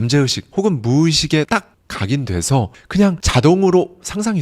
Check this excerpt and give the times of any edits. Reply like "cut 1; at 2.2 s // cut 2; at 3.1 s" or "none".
cut 1; at 1.5 s